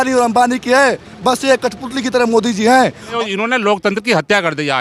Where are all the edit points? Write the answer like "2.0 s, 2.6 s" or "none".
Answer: 3.2 s